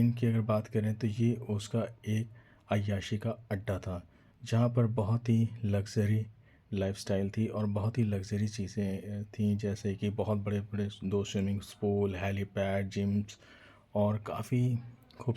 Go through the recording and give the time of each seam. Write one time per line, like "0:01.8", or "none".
none